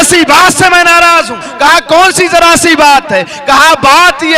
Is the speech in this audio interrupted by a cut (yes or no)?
no